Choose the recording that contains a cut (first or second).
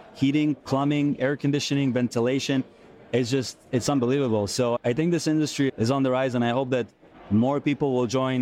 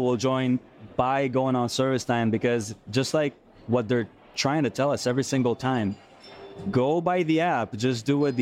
first